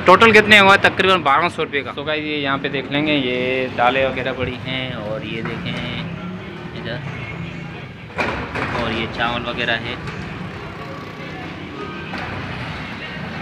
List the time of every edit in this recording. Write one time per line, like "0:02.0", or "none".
0:01.9